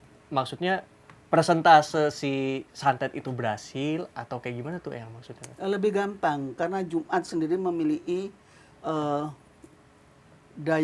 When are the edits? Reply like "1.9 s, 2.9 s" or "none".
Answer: none